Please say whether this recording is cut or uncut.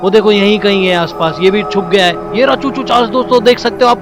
uncut